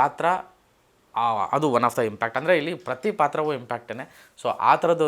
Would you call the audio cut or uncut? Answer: uncut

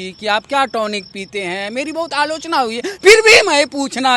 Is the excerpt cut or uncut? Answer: uncut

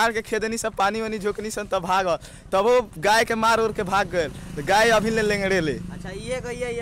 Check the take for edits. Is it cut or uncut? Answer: uncut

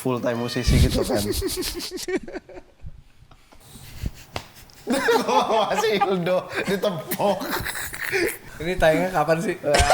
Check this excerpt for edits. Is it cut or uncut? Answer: cut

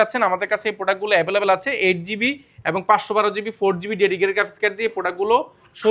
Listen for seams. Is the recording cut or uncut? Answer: uncut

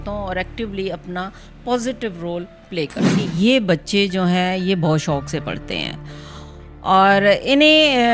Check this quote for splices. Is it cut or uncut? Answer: cut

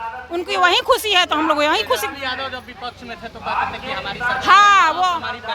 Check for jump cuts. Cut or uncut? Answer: uncut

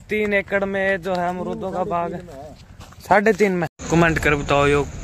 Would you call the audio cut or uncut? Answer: cut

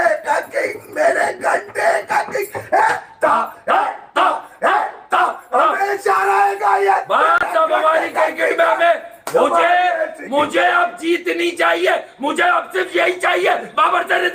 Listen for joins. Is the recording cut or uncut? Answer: uncut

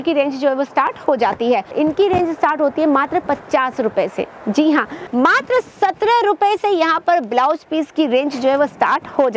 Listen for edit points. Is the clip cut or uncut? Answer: cut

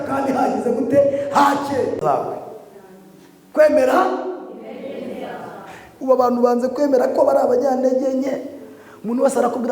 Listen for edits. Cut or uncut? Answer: cut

